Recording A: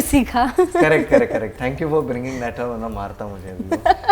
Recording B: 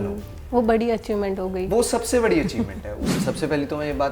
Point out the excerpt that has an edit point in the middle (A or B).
B